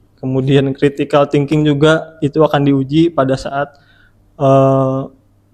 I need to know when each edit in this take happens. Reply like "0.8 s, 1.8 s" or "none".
none